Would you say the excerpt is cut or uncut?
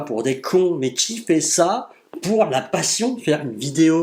uncut